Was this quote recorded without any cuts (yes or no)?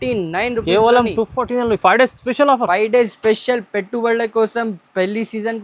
yes